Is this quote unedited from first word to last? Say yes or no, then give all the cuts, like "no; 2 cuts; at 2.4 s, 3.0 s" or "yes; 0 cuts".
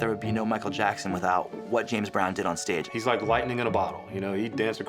no; 1 cut; at 2.8 s